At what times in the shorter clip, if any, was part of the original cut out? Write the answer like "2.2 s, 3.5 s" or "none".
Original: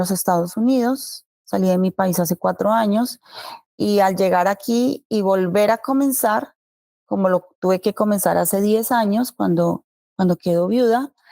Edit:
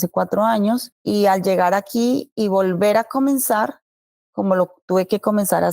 0.9 s